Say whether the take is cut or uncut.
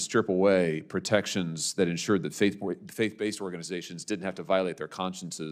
uncut